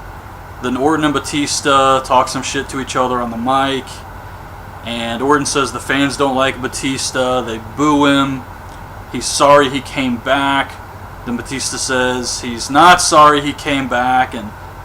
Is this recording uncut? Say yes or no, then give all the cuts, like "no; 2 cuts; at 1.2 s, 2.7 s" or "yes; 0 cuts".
no; 1 cut; at 4.0 s